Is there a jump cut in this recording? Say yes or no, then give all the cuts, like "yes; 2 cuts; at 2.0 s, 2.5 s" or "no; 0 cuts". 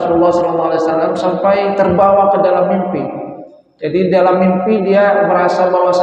no; 0 cuts